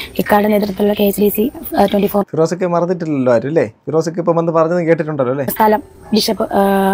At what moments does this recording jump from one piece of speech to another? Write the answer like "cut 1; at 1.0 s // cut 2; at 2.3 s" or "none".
cut 1; at 5.5 s